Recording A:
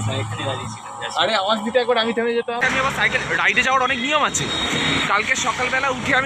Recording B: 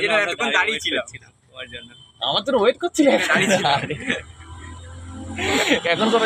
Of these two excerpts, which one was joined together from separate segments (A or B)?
A